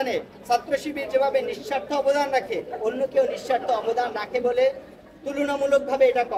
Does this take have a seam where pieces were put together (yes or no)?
no